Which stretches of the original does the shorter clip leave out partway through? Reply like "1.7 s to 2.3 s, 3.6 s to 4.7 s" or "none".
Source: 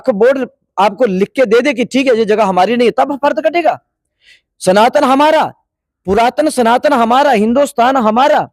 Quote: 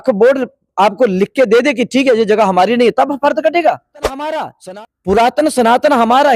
4.5 s to 5.5 s